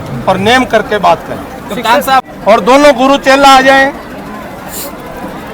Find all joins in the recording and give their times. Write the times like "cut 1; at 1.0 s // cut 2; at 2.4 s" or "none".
cut 1; at 2.3 s